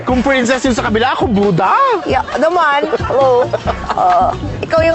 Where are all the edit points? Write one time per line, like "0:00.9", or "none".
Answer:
none